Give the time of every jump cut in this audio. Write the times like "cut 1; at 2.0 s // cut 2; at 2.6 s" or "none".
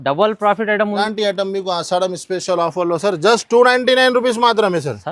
cut 1; at 1.0 s

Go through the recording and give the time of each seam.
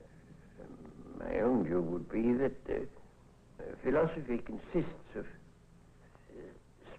cut 1; at 1.8 s

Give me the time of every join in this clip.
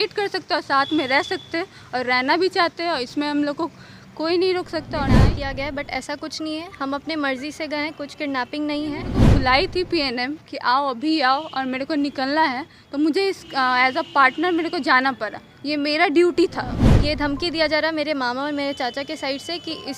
cut 1; at 5.0 s // cut 2; at 9.1 s // cut 3; at 16.8 s

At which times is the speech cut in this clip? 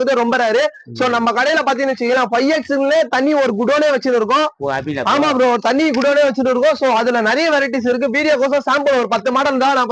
none

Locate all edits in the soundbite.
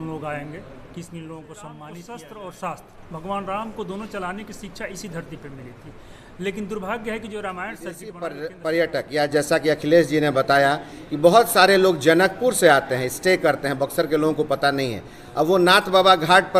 cut 1; at 1.9 s // cut 2; at 8.1 s

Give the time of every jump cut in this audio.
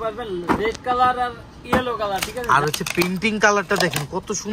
cut 1; at 2.4 s

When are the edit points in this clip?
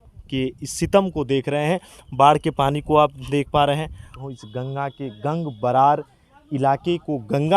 cut 1; at 4.1 s

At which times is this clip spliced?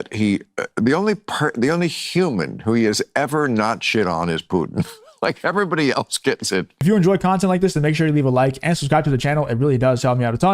cut 1; at 6.8 s

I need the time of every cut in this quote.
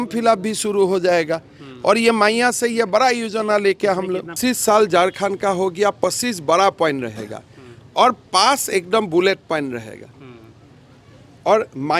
cut 1; at 4.4 s

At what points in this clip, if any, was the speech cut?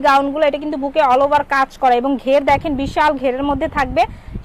none

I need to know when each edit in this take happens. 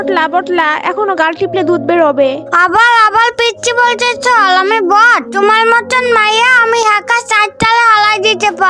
cut 1; at 2.5 s // cut 2; at 5.2 s

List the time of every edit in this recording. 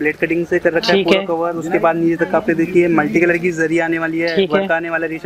none

